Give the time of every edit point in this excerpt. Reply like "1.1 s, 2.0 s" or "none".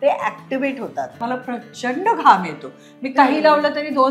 1.1 s